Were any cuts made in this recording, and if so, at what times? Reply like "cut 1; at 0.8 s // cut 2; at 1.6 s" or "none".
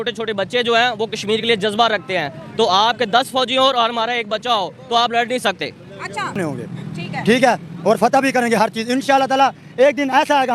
cut 1; at 6.4 s